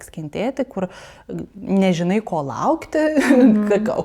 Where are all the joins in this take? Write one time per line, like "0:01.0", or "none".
none